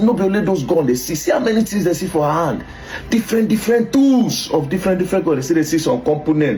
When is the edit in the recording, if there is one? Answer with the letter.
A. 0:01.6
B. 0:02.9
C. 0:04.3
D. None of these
D